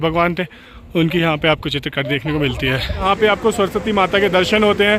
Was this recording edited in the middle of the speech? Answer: yes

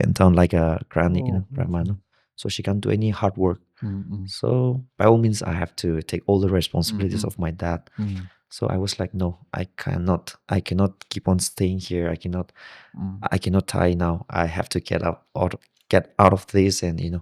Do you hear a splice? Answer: no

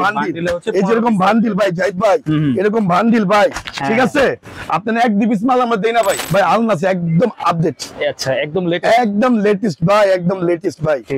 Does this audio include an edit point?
yes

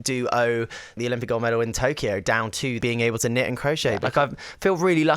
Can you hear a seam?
yes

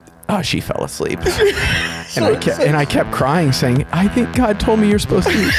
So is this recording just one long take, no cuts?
yes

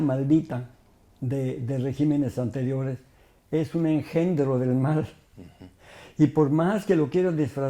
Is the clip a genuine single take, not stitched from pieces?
yes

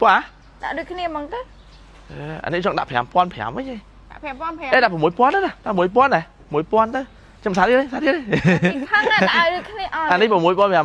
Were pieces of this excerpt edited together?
no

